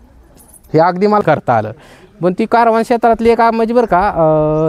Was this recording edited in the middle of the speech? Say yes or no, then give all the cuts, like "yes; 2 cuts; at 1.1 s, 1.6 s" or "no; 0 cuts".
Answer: yes; 1 cut; at 1.2 s